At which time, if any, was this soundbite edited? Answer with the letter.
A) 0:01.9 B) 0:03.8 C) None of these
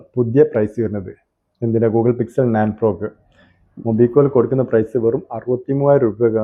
C